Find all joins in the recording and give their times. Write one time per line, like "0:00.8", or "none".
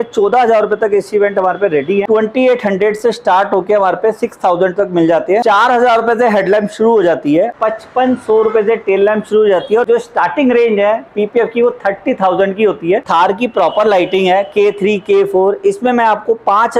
0:02.1
0:05.4
0:07.6
0:09.8
0:13.1